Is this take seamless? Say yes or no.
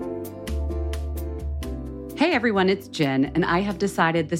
no